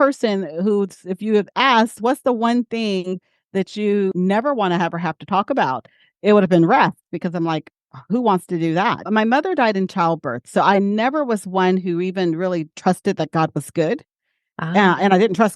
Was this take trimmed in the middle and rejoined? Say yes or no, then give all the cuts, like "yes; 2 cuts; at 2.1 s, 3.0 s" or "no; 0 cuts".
yes; 1 cut; at 4.1 s